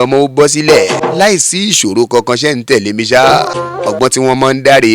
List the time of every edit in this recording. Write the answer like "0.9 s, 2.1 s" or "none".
1.0 s, 3.6 s